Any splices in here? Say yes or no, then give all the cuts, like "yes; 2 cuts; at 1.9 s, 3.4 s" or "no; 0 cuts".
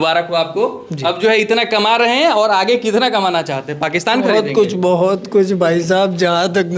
no; 0 cuts